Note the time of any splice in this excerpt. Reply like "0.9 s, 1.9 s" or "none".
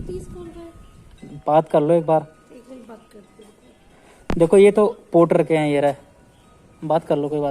none